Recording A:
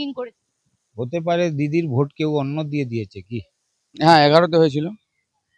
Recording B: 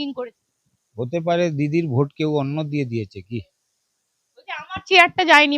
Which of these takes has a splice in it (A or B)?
A